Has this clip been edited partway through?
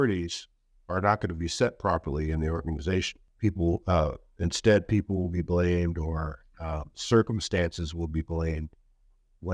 yes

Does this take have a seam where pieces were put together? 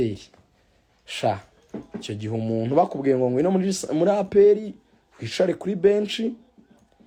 no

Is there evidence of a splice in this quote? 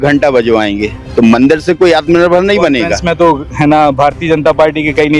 yes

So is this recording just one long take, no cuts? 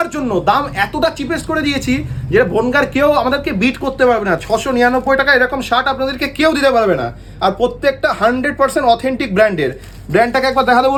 yes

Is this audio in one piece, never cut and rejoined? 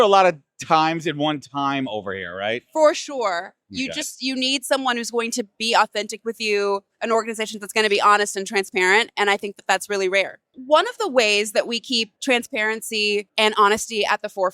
no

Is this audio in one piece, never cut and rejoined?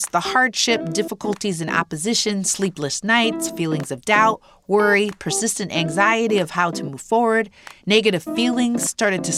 yes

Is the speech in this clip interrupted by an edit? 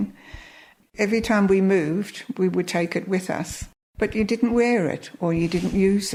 no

